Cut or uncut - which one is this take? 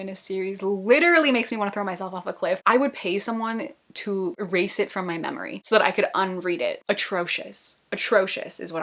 cut